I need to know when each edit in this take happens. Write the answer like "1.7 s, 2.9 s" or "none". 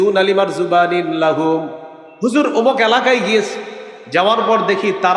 none